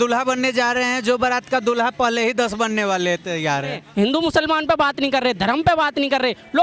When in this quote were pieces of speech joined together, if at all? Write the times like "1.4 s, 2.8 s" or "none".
3.8 s